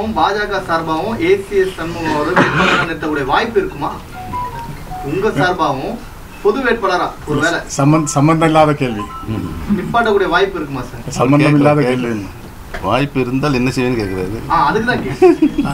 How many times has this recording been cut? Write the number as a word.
zero